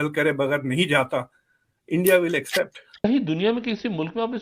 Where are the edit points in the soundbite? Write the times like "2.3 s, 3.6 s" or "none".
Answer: 2.9 s